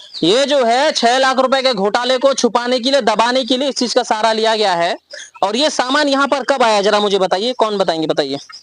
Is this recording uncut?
yes; 0 cuts

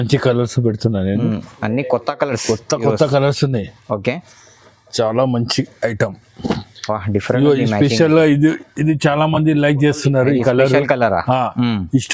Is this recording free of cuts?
yes; 0 cuts

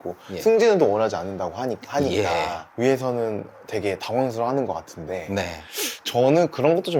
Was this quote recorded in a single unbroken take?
yes; 0 cuts

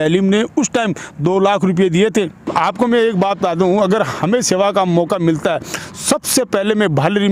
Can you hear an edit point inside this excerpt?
yes; 1 cut; at 2.5 s

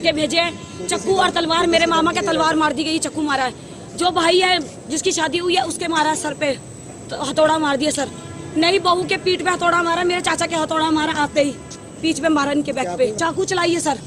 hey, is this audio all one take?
no; 1 cut; at 13.2 s

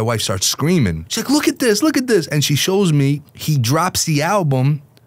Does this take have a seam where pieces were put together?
yes; 2 cuts; at 1.1 s, 3.3 s

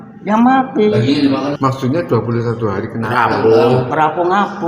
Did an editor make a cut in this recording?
yes; 1 cut; at 1.6 s

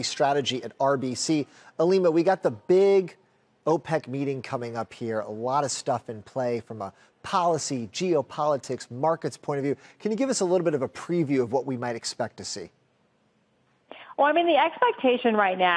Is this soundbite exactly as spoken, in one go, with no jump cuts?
yes; 0 cuts

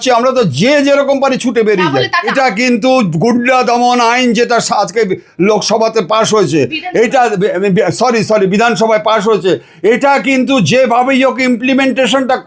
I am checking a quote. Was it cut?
yes; 1 cut; at 2.3 s

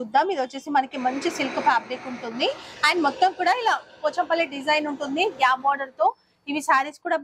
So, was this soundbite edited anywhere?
no; 0 cuts

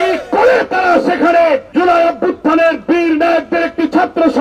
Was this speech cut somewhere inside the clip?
yes; 1 cut; at 1.7 s

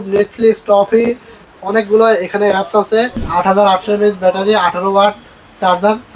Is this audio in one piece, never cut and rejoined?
no; 1 cut; at 3.2 s

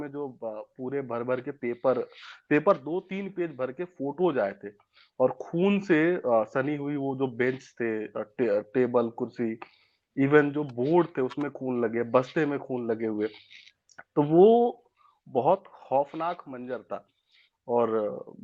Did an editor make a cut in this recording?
no; 0 cuts

